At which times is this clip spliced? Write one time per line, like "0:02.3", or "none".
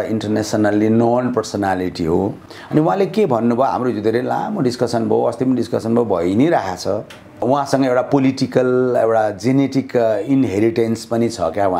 0:02.4
0:07.4